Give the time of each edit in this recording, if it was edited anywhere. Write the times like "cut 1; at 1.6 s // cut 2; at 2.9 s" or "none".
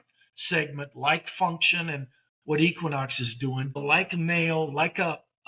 cut 1; at 3.8 s